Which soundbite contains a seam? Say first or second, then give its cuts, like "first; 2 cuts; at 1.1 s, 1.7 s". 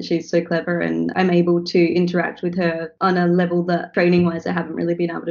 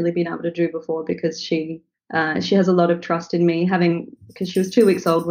first; 3 cuts; at 1.1 s, 2.9 s, 3.9 s